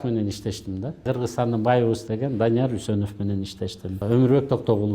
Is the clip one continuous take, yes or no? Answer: no